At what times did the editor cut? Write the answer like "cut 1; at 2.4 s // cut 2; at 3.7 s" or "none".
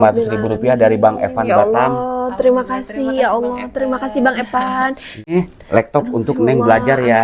cut 1; at 5.3 s